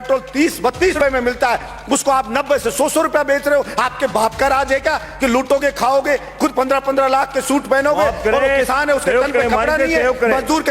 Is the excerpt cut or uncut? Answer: cut